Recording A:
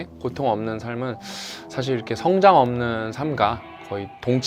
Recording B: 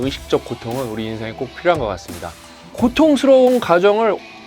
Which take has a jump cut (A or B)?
B